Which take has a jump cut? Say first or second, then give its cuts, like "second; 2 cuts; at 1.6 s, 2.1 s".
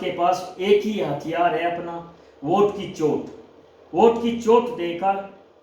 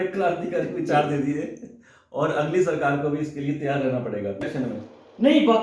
second; 1 cut; at 4.5 s